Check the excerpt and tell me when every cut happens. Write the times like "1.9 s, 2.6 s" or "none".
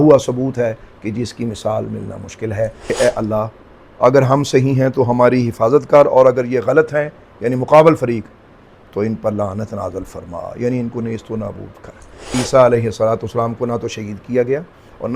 2.9 s, 12.3 s